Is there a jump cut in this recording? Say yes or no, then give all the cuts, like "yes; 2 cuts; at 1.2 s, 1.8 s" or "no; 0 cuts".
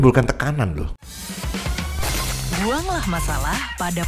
yes; 1 cut; at 1.1 s